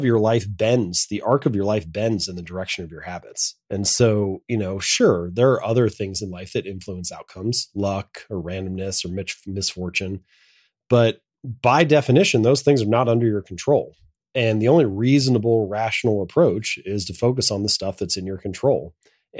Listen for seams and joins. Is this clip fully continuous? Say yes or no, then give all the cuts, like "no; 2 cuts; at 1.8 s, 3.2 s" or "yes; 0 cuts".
yes; 0 cuts